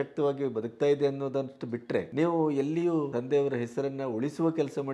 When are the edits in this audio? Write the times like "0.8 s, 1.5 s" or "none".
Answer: 2.1 s, 3.1 s